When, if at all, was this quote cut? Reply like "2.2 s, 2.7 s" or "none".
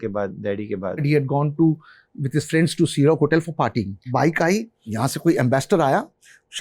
1.0 s, 4.0 s, 4.8 s